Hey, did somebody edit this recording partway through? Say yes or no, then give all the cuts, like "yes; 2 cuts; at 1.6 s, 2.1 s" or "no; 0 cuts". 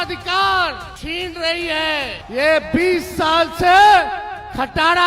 yes; 2 cuts; at 0.9 s, 2.2 s